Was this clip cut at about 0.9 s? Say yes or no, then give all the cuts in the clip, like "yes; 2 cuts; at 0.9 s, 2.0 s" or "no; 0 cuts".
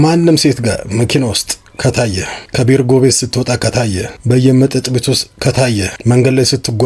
no; 3 cuts; at 2.4 s, 3.8 s, 5.9 s